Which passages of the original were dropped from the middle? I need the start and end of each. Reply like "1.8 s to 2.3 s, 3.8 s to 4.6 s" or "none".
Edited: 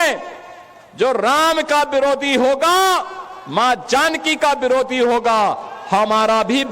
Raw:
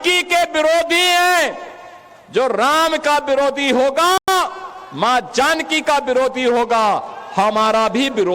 4.2 s to 4.3 s

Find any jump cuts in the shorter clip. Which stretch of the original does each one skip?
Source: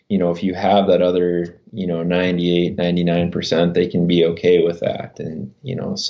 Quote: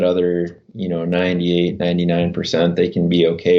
none

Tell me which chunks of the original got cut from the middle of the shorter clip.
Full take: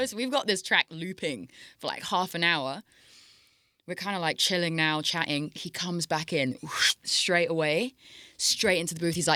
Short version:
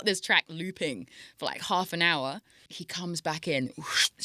3.2 s to 5.7 s

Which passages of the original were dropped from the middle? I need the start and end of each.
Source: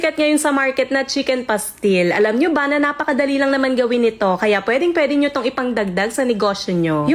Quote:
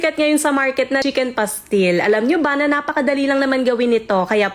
1.0 s to 1.1 s

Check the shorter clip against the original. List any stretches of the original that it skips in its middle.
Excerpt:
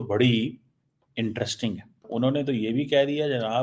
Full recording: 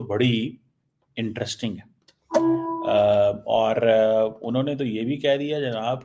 2.1 s to 4.4 s

